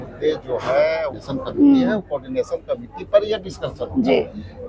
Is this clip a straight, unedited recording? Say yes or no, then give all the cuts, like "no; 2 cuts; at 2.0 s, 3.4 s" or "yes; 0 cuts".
no; 1 cut; at 1.1 s